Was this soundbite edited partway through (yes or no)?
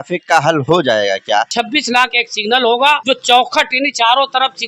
yes